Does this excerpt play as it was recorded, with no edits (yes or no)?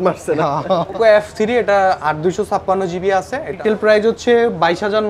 no